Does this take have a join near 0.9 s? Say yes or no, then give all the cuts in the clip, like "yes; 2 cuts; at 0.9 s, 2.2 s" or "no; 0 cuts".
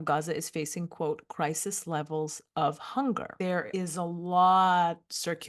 no; 1 cut; at 3.4 s